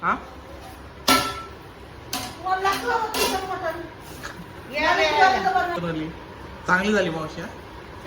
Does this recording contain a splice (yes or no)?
yes